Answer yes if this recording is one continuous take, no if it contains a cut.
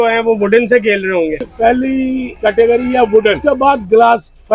no